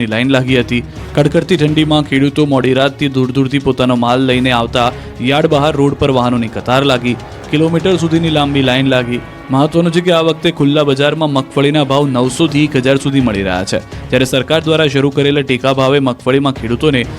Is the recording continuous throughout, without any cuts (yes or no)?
no